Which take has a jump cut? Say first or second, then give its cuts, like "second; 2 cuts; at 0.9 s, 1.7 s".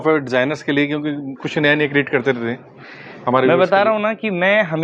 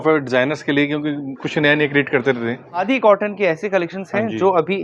second; 1 cut; at 2.8 s